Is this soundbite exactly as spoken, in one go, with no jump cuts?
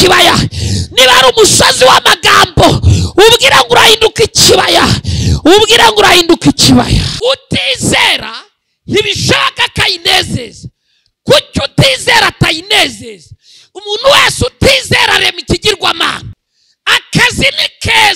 no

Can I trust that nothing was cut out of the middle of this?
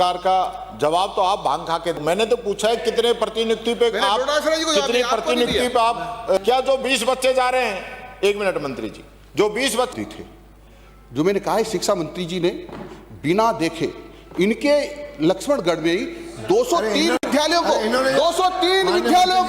no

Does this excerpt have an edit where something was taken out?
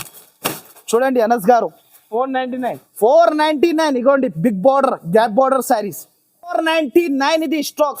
yes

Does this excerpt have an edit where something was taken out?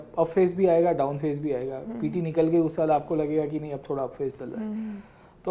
no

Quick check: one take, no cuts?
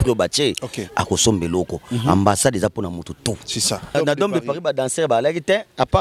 no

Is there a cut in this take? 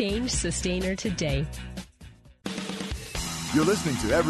yes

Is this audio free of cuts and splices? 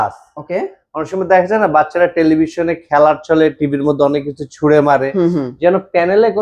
yes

